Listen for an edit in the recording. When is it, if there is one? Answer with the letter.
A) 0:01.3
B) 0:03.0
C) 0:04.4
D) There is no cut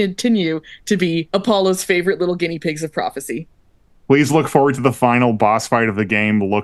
A